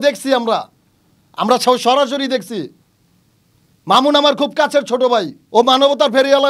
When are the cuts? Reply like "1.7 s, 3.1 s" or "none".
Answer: 5.4 s